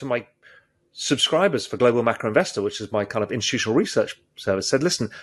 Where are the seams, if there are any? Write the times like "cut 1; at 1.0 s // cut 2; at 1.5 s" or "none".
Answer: none

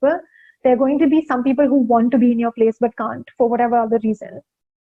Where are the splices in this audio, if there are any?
none

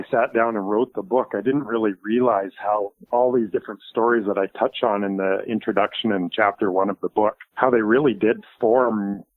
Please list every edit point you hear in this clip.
cut 1; at 3.0 s // cut 2; at 7.4 s

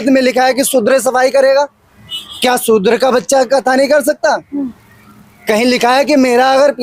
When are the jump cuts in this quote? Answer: none

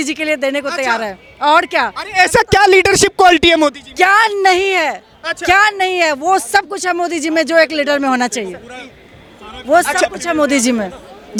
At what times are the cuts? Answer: none

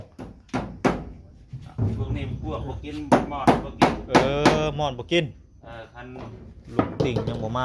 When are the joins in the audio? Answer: cut 1; at 6.5 s

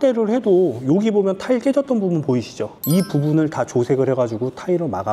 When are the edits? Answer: none

